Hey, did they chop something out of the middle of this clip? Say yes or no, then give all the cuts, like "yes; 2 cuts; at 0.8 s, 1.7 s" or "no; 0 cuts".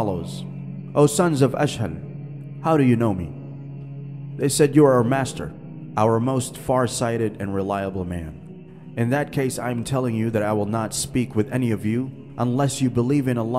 yes; 1 cut; at 12.2 s